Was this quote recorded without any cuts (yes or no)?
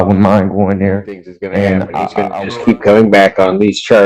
no